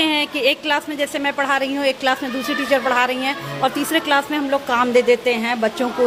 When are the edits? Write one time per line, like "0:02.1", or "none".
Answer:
none